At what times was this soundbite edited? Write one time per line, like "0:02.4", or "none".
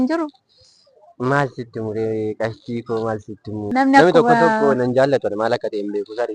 0:03.6